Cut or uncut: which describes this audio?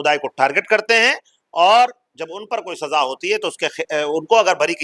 uncut